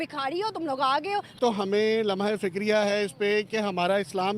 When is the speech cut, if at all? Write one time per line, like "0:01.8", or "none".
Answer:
0:01.4